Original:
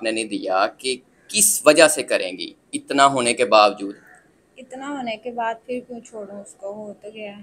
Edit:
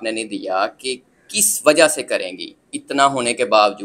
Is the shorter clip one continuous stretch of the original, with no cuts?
yes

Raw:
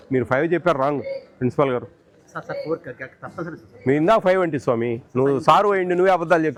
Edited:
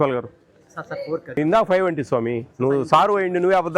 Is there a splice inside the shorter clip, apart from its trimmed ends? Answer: yes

